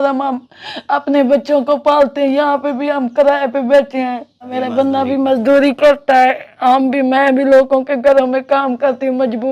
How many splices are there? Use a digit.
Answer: 1